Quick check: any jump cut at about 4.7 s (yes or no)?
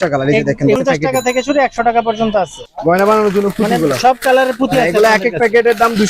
no